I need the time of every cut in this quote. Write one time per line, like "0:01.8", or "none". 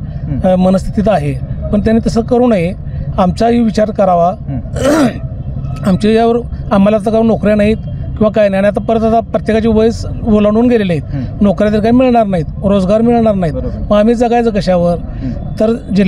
none

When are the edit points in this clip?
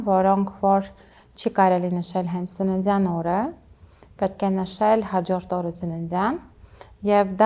none

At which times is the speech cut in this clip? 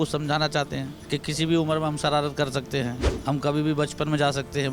0:00.9
0:03.1

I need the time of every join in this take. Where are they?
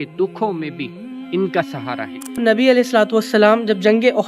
0:02.4

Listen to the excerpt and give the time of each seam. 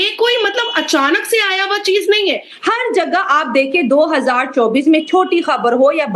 0:02.5

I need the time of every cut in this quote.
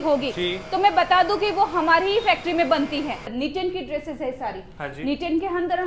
0:03.3

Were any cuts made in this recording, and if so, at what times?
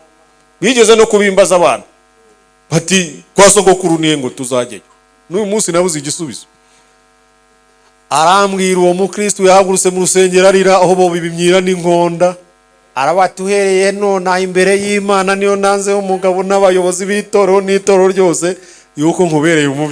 none

